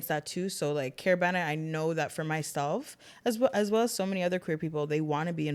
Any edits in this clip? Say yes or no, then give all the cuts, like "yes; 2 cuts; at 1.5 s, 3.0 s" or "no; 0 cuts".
no; 0 cuts